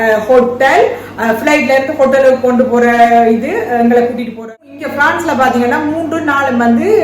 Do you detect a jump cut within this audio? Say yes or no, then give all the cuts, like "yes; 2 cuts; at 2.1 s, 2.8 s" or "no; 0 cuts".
yes; 1 cut; at 4.4 s